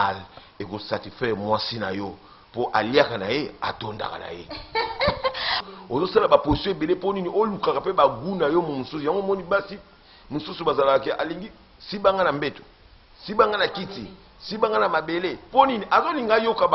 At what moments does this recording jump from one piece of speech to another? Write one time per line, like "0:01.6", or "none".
0:05.6